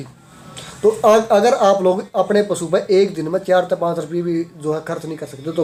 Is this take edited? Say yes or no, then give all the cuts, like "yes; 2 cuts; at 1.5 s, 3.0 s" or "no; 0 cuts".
no; 0 cuts